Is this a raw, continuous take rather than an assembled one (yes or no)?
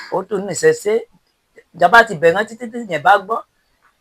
yes